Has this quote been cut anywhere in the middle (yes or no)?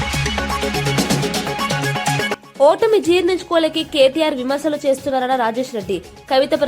yes